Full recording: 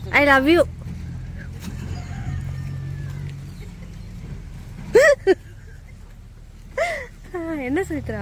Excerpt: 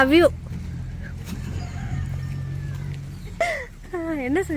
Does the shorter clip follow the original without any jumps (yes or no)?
no